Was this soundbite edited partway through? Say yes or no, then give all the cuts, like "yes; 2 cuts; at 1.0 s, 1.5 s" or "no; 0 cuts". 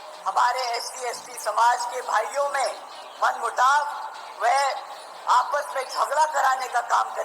no; 0 cuts